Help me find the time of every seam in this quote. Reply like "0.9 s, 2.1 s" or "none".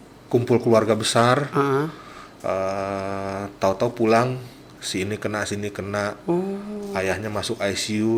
none